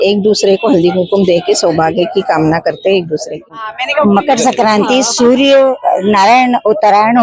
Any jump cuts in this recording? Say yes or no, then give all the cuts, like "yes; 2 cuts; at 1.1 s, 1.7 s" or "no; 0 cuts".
yes; 1 cut; at 3.3 s